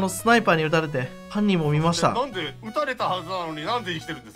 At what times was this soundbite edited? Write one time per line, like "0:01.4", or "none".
0:01.2
0:02.5